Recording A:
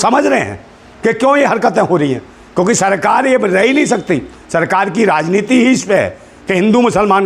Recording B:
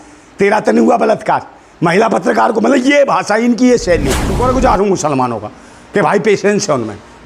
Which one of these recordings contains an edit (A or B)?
B